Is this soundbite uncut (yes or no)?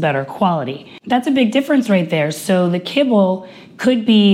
no